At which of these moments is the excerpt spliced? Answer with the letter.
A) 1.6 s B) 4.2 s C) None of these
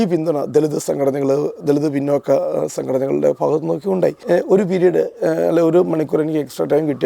B